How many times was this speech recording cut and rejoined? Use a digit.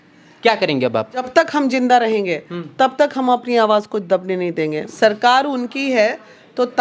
2